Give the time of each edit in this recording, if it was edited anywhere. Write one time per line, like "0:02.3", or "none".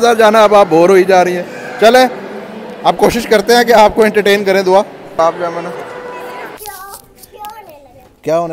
0:05.0
0:06.5